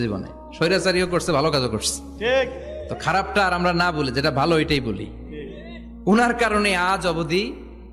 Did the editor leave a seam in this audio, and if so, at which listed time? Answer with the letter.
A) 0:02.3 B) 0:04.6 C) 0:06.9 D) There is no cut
D